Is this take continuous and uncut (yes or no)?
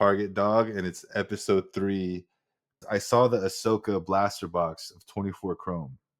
no